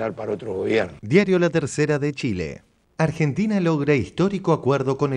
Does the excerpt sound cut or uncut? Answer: cut